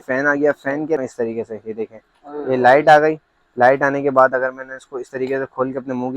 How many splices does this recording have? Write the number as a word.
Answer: one